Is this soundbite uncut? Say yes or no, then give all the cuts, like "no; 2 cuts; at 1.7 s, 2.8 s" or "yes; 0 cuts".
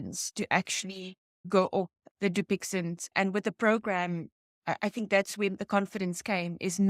no; 1 cut; at 1.3 s